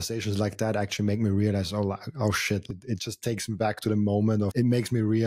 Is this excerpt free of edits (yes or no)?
no